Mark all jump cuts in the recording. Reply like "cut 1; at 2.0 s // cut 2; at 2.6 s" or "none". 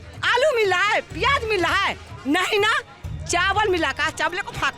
none